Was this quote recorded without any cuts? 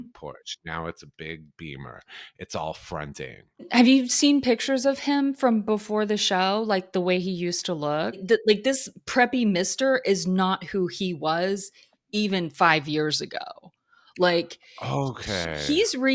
no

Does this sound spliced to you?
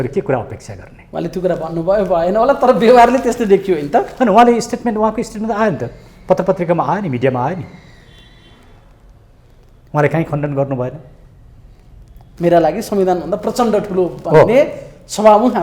no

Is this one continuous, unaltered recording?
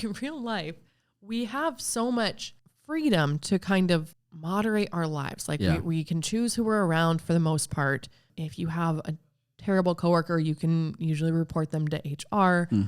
no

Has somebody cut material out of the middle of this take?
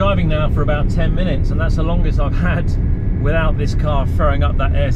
no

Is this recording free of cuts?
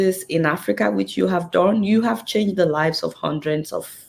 yes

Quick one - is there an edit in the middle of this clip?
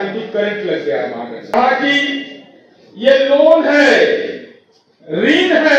yes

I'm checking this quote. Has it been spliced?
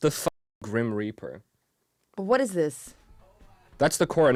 no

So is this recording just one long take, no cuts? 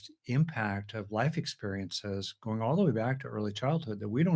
yes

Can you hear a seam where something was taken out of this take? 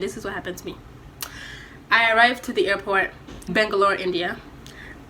yes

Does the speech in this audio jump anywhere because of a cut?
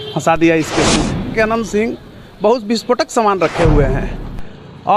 yes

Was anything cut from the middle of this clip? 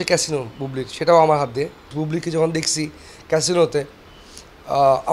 yes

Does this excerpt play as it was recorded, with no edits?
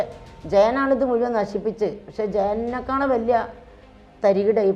yes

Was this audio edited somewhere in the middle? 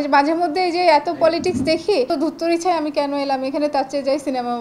yes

